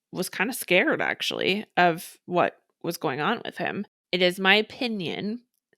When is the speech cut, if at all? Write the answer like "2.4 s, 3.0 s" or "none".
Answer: 3.9 s